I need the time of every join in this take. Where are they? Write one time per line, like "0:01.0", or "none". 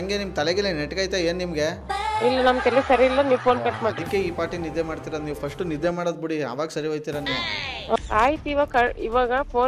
0:08.0